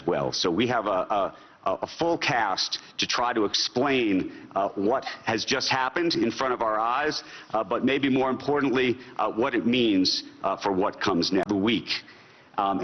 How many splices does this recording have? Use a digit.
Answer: 1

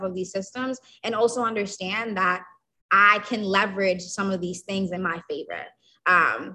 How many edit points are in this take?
1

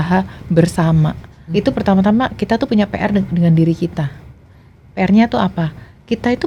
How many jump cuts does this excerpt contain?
1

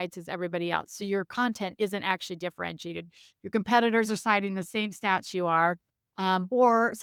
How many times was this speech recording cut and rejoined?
0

